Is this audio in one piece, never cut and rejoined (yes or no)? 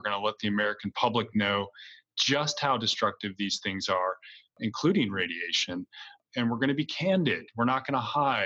yes